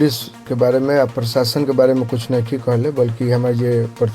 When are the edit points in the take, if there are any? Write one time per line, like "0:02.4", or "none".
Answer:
0:03.2